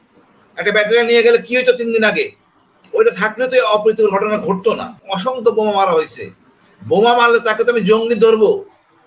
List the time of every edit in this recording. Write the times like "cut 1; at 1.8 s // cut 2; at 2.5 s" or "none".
cut 1; at 4.9 s